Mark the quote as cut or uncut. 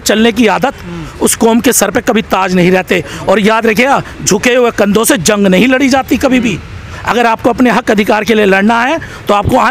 uncut